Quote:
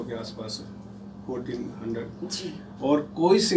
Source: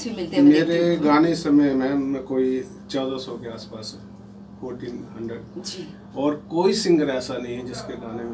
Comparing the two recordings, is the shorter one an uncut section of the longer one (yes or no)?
yes